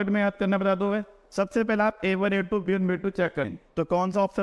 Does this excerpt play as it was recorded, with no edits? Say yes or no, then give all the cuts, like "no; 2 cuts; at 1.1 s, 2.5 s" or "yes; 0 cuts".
no; 1 cut; at 3.5 s